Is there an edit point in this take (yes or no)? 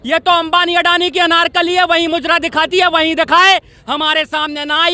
no